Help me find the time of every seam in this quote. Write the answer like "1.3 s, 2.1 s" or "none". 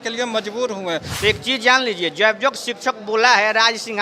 1.1 s